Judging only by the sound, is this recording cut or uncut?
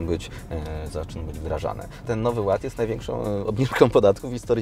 cut